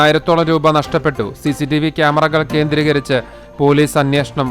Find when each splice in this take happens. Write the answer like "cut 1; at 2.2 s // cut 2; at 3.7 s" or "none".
none